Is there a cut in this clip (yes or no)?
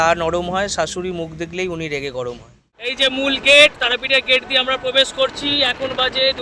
yes